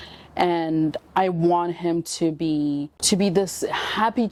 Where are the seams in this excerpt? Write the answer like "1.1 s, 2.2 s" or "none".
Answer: none